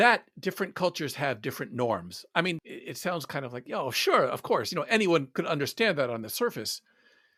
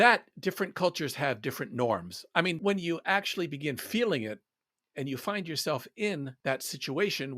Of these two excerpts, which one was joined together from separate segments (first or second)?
second